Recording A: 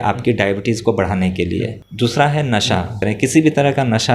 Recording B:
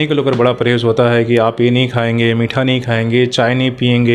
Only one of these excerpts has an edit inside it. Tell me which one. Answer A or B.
A